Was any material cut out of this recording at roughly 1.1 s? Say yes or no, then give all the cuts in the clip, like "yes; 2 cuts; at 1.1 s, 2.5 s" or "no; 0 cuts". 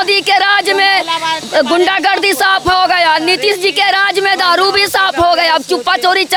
no; 0 cuts